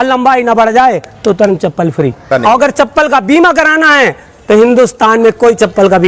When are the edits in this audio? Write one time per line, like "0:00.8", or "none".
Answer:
0:02.3